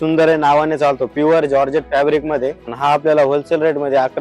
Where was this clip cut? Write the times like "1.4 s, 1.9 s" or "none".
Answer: 2.6 s